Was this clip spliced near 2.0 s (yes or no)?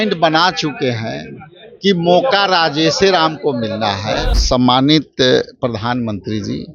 no